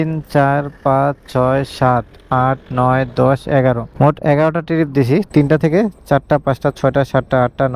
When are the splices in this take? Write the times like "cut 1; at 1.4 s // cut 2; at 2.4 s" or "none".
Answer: cut 1; at 5.3 s